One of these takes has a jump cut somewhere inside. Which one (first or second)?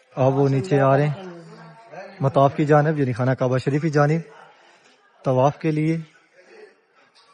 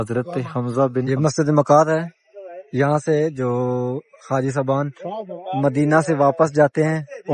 second